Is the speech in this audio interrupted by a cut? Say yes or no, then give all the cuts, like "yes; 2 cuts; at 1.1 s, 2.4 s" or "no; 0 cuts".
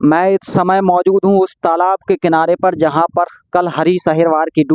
no; 0 cuts